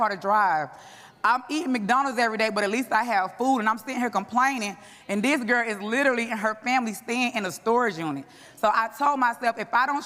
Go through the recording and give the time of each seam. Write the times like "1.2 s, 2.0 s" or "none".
none